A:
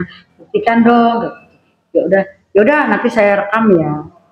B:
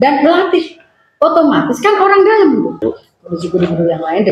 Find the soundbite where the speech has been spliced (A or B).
B